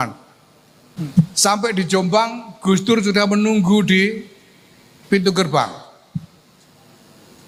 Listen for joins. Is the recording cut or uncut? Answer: cut